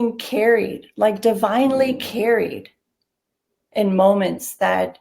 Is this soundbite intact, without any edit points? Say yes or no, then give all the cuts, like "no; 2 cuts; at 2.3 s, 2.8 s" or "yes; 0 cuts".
yes; 0 cuts